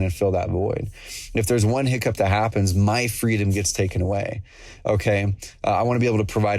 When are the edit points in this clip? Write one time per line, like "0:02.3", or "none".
none